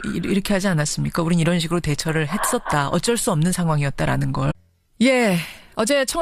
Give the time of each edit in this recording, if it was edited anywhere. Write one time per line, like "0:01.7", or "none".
none